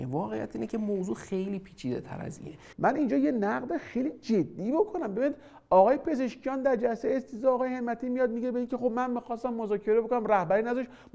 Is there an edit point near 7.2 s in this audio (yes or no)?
no